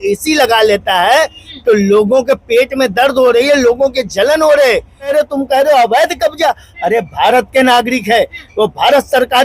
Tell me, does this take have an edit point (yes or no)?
yes